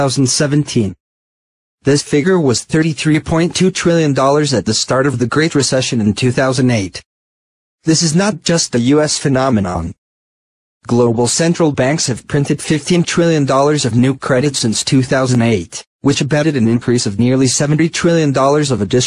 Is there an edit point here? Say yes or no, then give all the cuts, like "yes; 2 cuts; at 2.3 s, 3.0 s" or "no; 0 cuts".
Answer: yes; 1 cut; at 15.0 s